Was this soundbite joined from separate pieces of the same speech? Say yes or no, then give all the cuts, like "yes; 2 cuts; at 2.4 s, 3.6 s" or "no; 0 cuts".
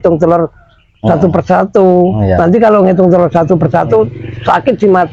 no; 0 cuts